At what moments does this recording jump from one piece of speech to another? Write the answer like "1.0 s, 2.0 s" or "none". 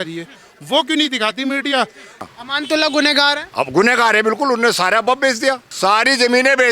2.3 s, 5.7 s